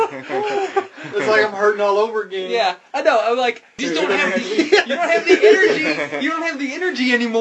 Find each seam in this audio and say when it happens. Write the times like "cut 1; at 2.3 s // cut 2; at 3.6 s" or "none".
cut 1; at 3.7 s